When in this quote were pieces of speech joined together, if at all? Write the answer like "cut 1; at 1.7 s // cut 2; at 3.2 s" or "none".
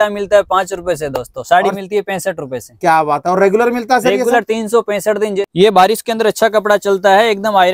cut 1; at 5.4 s